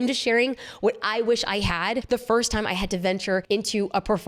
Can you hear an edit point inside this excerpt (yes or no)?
yes